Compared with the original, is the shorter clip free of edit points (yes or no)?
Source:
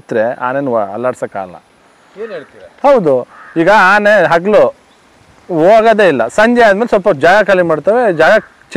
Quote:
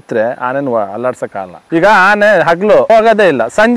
no